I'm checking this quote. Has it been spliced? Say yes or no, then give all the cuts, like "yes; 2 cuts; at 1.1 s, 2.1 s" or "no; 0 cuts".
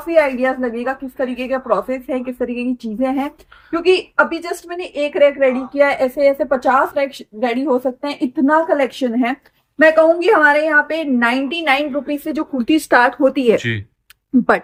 no; 0 cuts